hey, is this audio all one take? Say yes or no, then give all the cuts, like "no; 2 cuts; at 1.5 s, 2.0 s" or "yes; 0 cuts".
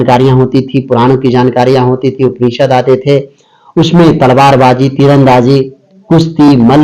yes; 0 cuts